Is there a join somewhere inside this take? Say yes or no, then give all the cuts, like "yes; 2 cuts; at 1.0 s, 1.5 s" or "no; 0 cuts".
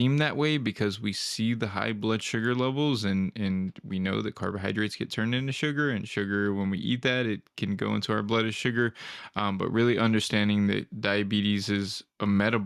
no; 0 cuts